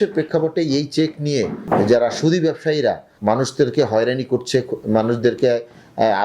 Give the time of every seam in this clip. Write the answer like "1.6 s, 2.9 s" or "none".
1.6 s, 3.1 s